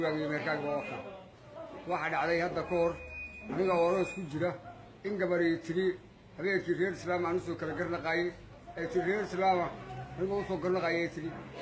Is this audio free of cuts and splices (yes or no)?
no